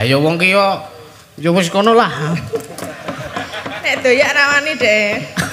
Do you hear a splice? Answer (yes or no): no